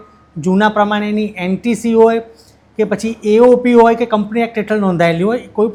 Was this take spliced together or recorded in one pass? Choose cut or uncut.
uncut